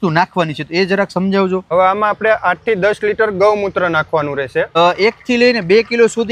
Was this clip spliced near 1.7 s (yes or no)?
yes